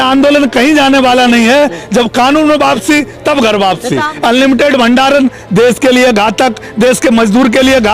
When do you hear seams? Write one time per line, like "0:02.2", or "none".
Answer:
0:04.1